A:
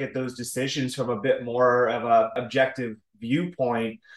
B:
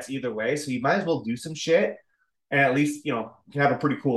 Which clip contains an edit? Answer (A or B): A